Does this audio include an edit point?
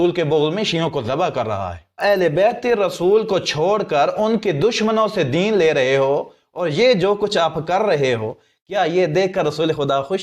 yes; 1 cut; at 2.0 s

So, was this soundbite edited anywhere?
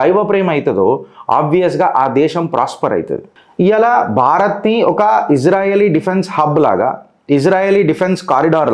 no; 0 cuts

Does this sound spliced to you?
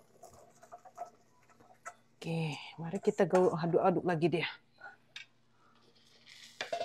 no; 0 cuts

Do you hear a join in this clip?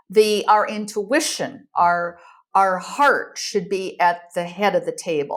no; 0 cuts

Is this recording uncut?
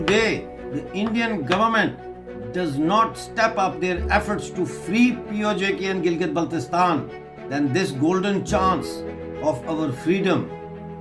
yes; 0 cuts

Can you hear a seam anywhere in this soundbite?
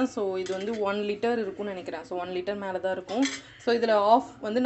no; 0 cuts

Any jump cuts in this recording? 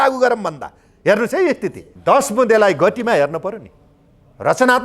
yes; 1 cut; at 1.9 s

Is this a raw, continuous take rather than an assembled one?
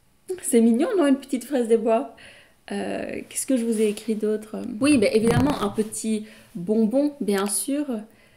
no; 1 cut; at 4.7 s

